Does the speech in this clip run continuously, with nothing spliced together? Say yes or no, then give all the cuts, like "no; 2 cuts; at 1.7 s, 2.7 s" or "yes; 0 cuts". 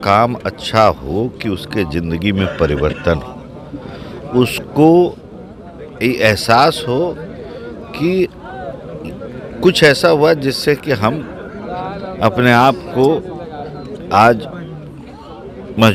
yes; 0 cuts